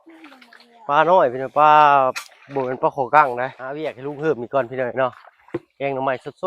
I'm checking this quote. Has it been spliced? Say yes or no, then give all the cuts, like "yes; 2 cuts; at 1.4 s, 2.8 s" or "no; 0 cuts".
yes; 1 cut; at 3.7 s